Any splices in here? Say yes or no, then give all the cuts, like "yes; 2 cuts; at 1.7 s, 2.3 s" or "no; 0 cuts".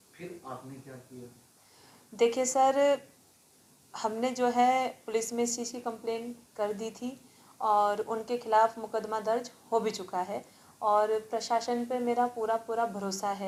no; 0 cuts